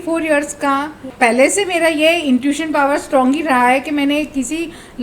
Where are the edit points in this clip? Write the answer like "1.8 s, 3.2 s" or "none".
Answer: 1.1 s